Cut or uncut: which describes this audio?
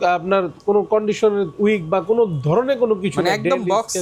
uncut